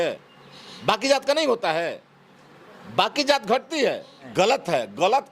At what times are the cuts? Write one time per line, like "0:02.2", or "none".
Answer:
0:04.2